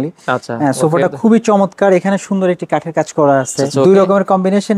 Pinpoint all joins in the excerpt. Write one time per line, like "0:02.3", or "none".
0:03.7